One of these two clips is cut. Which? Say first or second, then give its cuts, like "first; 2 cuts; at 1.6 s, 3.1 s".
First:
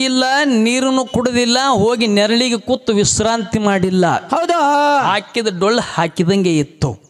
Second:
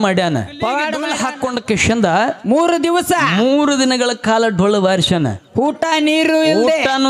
second; 1 cut; at 1.0 s